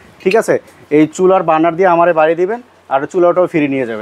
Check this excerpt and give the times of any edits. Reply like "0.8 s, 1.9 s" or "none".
none